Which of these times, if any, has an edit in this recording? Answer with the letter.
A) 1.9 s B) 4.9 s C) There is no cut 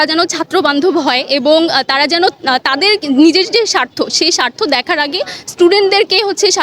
C